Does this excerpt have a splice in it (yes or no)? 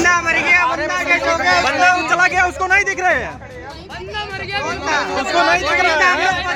no